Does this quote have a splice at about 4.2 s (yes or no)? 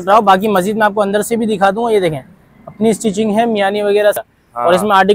yes